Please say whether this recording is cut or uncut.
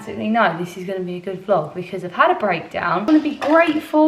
cut